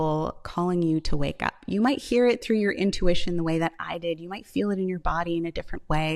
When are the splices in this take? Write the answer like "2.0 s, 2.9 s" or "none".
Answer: none